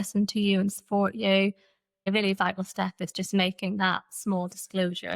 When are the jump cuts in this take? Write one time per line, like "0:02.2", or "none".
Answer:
0:02.1